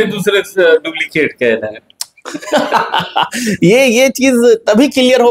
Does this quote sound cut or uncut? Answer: uncut